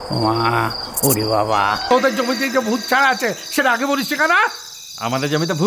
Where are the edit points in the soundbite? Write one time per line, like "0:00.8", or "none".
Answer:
0:01.8